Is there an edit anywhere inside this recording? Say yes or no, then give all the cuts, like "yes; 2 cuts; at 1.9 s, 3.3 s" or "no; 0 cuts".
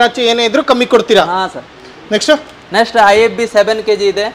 no; 0 cuts